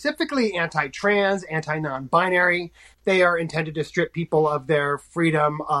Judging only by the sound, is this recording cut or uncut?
uncut